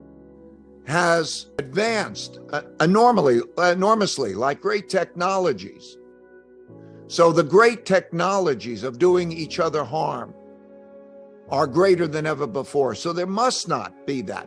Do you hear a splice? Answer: yes; 1 cut; at 1.6 s

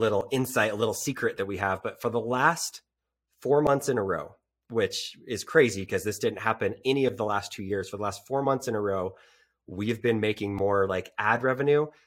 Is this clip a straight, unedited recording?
yes; 0 cuts

